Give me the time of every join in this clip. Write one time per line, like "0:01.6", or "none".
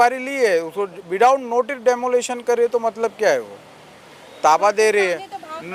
none